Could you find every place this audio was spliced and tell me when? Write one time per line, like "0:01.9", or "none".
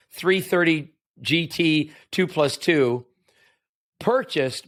none

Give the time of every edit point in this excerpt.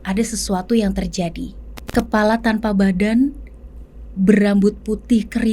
0:01.8

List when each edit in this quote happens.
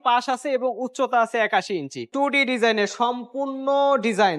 0:02.1

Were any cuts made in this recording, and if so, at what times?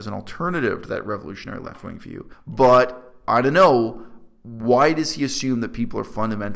0:02.3

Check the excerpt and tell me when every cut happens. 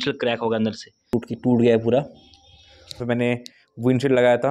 0:01.1
0:02.9

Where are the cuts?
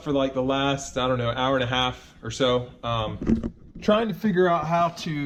none

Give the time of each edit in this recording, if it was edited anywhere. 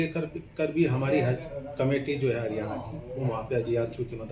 none

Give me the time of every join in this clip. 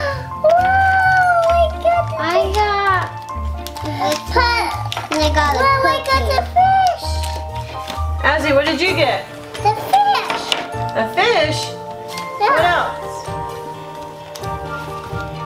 0:13.0

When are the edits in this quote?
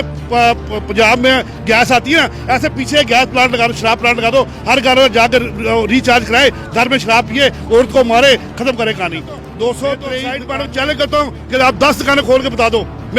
0:10.3

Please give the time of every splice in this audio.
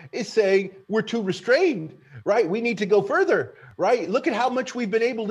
none

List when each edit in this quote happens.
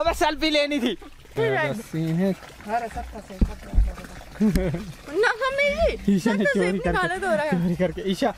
none

